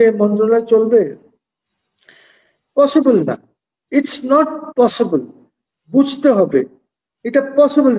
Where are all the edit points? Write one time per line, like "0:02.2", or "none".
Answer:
none